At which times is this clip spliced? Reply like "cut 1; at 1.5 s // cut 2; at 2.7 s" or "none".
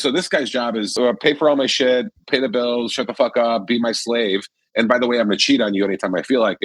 cut 1; at 0.9 s